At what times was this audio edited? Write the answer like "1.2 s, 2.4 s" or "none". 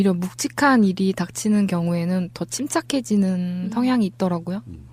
2.7 s